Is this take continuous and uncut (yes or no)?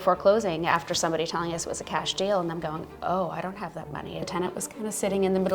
no